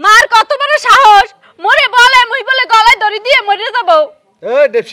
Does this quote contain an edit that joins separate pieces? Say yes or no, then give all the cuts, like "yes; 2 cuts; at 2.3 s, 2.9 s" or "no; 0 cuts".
no; 0 cuts